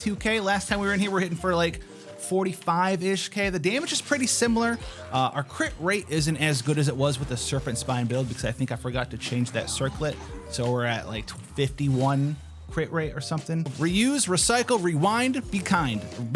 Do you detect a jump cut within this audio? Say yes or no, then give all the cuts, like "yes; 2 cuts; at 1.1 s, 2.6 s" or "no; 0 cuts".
yes; 1 cut; at 13.7 s